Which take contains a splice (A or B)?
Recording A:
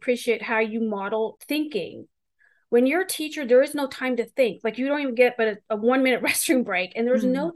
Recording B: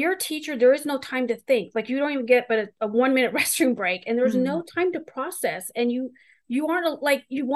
A